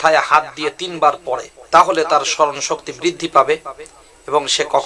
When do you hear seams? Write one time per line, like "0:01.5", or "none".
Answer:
0:01.5